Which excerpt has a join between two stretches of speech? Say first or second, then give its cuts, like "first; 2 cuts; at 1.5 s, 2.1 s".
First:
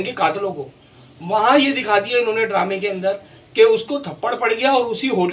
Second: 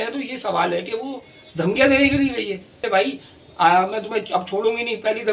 second; 1 cut; at 2.8 s